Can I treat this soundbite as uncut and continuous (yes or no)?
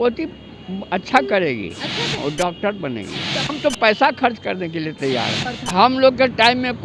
no